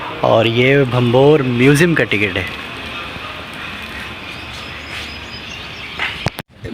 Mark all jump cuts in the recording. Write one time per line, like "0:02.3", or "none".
none